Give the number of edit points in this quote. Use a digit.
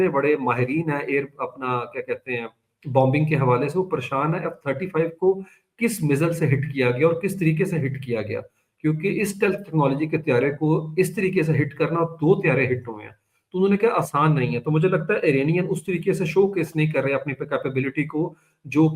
0